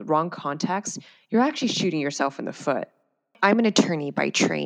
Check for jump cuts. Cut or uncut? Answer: cut